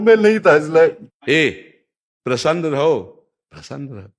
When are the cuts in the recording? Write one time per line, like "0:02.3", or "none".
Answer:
0:01.1